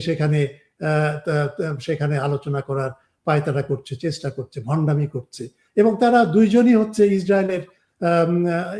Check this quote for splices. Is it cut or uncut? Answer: uncut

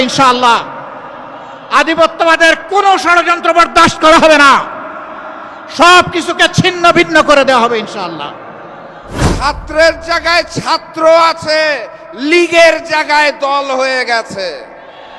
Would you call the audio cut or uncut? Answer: cut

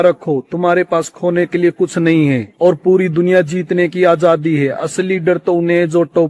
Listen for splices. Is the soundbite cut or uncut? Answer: uncut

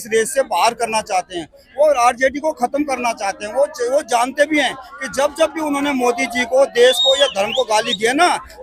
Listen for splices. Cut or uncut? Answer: uncut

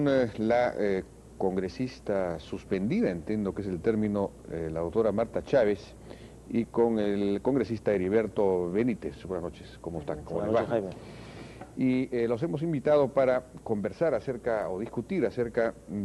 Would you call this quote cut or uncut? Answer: uncut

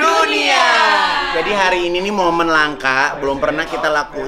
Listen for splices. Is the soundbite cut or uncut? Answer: cut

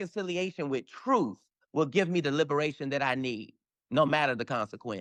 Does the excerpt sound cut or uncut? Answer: uncut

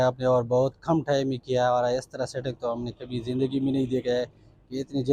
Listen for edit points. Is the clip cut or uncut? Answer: uncut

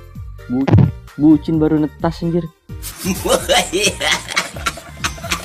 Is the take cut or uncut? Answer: uncut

